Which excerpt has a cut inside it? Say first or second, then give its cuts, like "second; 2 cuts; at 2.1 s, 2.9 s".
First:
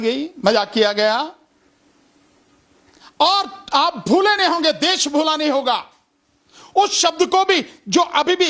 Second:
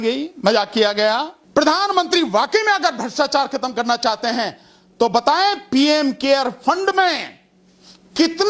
second; 1 cut; at 1.4 s